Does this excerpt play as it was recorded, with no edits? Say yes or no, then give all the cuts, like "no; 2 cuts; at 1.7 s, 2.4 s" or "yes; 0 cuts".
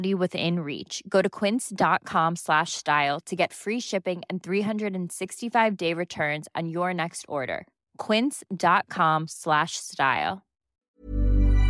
no; 1 cut; at 10.7 s